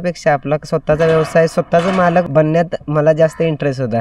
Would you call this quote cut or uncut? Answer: cut